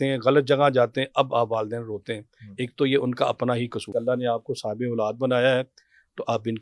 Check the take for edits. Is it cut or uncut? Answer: cut